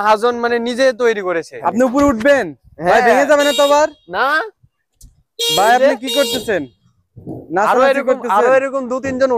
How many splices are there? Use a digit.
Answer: 1